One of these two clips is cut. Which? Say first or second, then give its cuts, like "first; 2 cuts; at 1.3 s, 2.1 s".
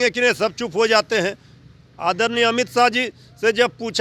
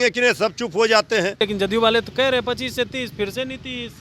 second; 1 cut; at 1.4 s